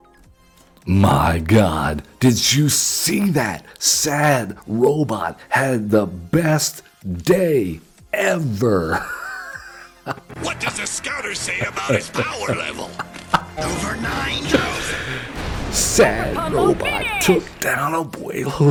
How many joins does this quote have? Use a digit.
0